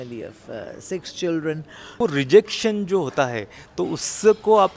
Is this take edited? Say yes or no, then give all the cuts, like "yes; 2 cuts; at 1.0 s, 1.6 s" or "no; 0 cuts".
yes; 1 cut; at 2.0 s